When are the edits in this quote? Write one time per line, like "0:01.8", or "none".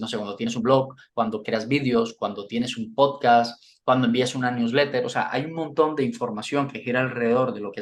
none

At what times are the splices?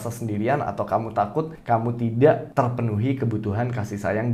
0:01.6
0:02.5

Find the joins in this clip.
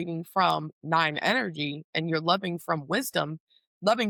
none

